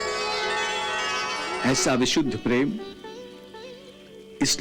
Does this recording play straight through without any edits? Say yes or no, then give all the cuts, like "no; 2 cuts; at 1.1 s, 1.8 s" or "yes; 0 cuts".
yes; 0 cuts